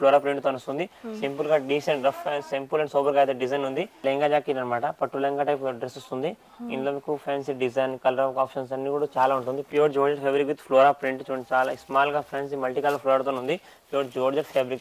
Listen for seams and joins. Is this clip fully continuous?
no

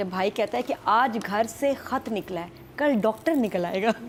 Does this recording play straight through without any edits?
yes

